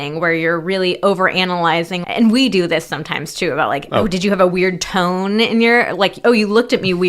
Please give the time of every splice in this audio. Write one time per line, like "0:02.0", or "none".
0:02.0